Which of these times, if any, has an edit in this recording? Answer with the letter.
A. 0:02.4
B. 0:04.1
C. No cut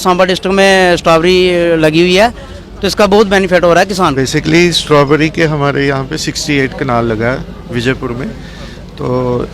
B